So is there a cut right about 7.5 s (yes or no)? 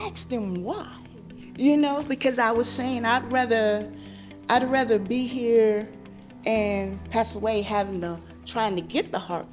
no